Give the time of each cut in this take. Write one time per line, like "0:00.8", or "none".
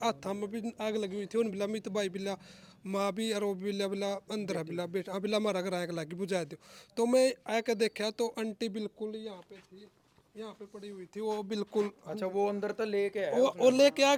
none